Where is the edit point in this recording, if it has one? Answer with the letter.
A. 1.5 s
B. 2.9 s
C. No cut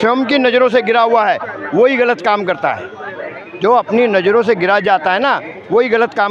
C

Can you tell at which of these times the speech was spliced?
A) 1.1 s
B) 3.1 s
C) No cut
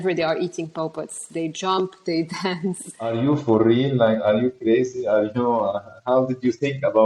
B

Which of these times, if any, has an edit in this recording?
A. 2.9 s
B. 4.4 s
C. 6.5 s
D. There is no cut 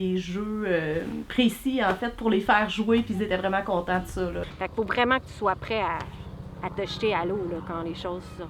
B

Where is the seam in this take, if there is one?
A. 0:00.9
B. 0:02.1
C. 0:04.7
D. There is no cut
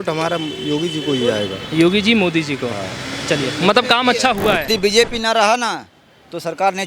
C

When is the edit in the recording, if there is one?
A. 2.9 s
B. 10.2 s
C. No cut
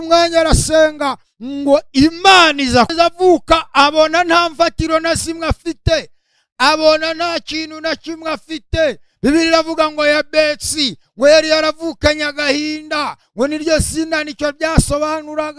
A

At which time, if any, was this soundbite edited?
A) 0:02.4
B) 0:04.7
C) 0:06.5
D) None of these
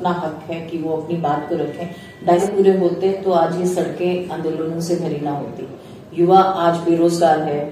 A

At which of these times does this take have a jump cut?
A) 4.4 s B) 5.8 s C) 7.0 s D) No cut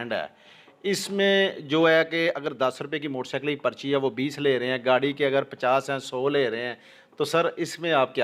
D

